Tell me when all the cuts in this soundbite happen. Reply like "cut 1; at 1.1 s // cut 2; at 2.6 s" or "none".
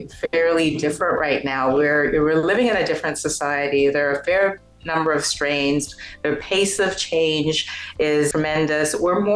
cut 1; at 8.3 s